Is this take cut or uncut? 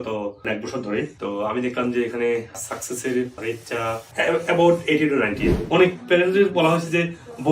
cut